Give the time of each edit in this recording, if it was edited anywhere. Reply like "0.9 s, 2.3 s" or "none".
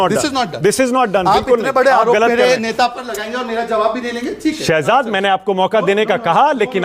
none